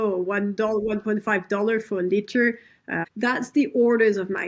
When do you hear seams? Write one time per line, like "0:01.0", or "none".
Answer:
0:03.1